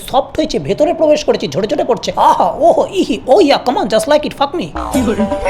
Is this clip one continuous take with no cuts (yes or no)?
yes